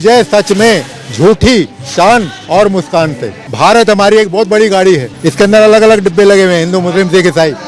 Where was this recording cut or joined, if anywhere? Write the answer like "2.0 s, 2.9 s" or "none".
3.4 s, 5.2 s